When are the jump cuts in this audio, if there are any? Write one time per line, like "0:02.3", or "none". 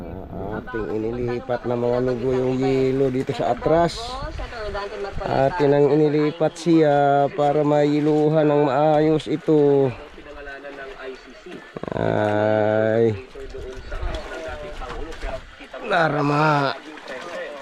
none